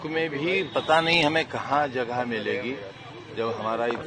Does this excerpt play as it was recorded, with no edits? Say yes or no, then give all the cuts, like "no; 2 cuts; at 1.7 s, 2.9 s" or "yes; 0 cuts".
yes; 0 cuts